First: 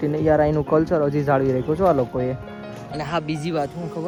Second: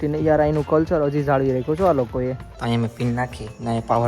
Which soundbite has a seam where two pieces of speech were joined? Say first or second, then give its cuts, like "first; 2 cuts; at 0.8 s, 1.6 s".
second; 1 cut; at 2.5 s